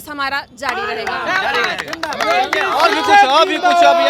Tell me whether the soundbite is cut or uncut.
uncut